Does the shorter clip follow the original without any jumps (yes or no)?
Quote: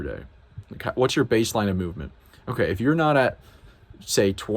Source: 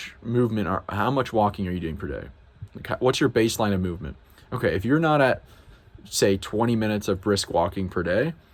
yes